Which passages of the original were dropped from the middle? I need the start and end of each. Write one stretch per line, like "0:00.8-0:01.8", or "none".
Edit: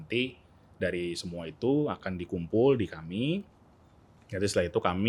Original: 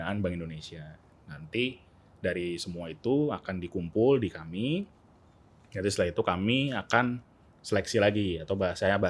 none